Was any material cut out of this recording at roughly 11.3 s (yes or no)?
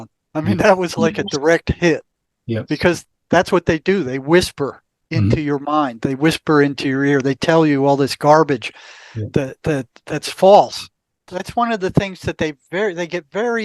yes